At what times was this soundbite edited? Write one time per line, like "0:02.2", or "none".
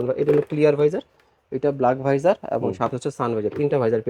none